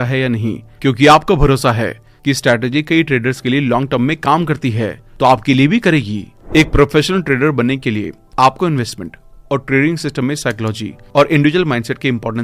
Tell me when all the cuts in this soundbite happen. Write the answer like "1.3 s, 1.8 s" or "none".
6.3 s